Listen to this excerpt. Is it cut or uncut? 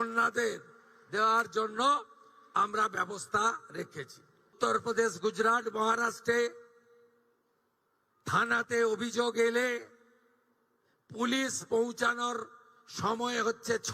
cut